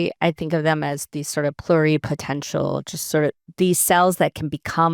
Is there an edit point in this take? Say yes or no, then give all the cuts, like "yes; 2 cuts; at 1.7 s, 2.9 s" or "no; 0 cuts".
no; 0 cuts